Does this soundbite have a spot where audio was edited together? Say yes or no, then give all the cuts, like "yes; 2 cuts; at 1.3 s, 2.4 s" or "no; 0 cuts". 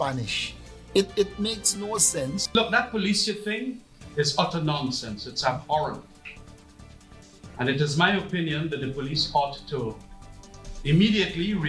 yes; 1 cut; at 2.4 s